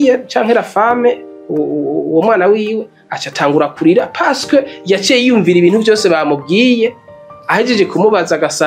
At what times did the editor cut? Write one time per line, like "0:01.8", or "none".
none